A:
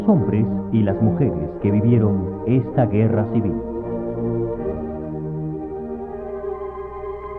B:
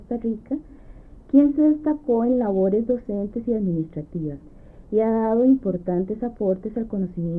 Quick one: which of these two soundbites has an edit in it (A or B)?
A